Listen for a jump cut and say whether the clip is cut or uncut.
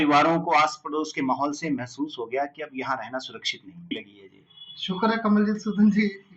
cut